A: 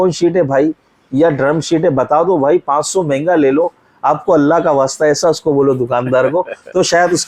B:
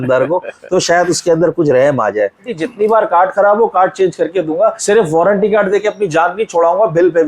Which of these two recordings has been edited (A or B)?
B